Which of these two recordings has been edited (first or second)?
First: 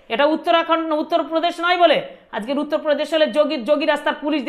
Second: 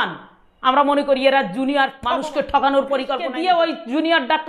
second